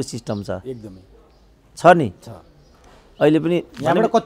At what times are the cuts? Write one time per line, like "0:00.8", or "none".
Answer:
none